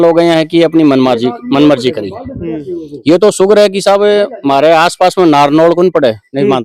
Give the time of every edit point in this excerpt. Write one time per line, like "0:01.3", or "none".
none